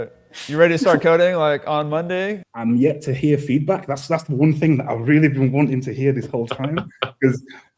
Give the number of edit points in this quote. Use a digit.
1